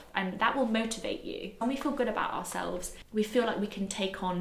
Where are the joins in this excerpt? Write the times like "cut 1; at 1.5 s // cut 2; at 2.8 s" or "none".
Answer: cut 1; at 1.6 s // cut 2; at 2.9 s

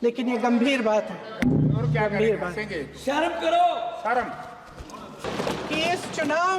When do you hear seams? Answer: cut 1; at 5.3 s

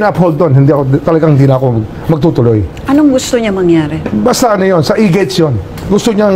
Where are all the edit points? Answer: none

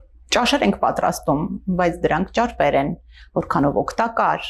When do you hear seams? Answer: none

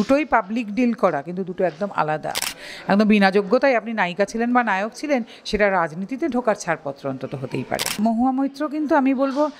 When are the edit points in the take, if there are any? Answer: cut 1; at 2.5 s // cut 2; at 8.0 s

